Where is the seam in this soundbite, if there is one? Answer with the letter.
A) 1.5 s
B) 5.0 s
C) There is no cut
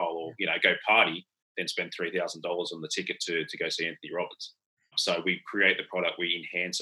B